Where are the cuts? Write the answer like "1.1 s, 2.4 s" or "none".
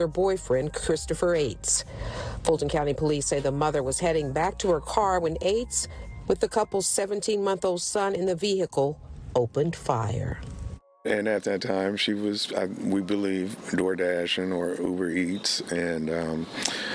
1.7 s, 10.4 s